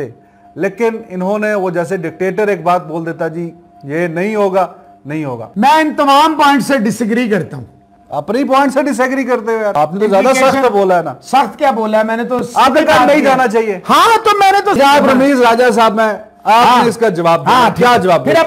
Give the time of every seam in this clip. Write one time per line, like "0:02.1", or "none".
0:05.4
0:09.7
0:14.8